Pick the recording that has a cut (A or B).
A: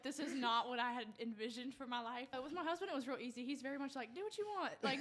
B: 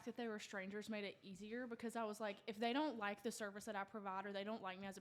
A